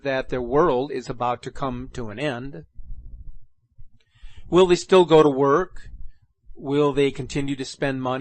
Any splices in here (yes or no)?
no